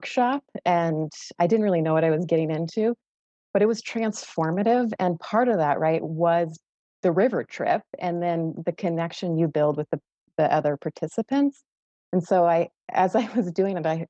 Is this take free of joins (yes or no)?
yes